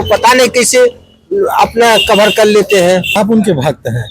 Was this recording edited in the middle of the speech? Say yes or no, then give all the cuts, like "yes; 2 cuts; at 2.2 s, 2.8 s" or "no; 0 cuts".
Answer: yes; 1 cut; at 3.1 s